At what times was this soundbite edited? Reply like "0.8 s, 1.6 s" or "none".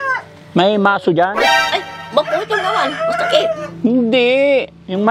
1.5 s